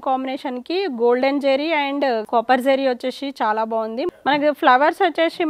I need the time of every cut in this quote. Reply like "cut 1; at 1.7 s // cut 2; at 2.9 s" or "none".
cut 1; at 2.2 s // cut 2; at 4.1 s